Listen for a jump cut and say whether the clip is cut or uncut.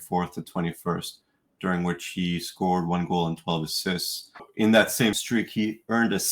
cut